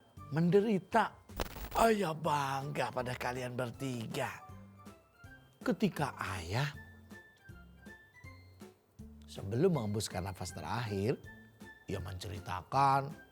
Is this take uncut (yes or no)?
no